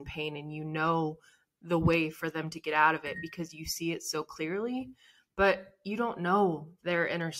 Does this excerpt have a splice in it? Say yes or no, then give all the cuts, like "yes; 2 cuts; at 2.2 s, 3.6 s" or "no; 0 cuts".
no; 0 cuts